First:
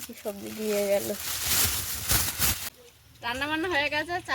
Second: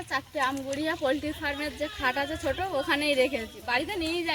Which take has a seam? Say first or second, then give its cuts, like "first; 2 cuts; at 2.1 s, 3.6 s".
first; 1 cut; at 2.6 s